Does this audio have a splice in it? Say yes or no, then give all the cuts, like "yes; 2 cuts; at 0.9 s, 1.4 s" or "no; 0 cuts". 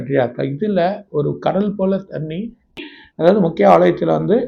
yes; 1 cut; at 2.7 s